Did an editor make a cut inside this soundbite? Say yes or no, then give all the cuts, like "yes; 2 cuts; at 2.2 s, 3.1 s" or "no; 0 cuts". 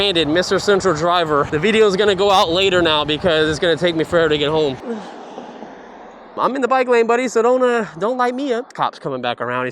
yes; 4 cuts; at 1.5 s, 4.8 s, 6.4 s, 8.7 s